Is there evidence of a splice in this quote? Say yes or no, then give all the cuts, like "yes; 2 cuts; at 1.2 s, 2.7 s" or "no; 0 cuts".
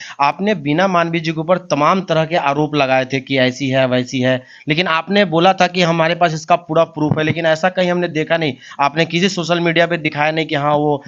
no; 0 cuts